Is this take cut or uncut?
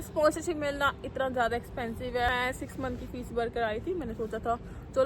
cut